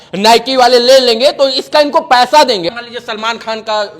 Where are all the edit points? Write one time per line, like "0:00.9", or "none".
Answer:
0:02.7